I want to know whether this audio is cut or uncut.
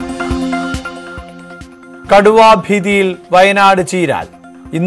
cut